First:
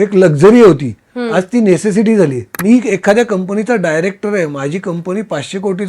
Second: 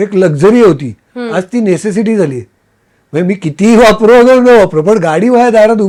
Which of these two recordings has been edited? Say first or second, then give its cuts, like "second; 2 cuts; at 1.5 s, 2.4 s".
first; 1 cut; at 2.6 s